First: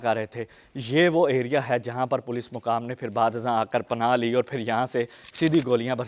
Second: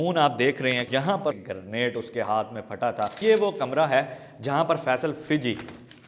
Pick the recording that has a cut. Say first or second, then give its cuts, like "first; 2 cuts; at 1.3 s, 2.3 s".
second; 2 cuts; at 1.1 s, 3.2 s